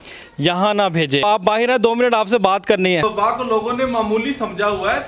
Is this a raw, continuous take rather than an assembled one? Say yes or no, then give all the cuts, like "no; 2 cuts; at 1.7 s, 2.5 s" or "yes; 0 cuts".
no; 2 cuts; at 1.2 s, 3.0 s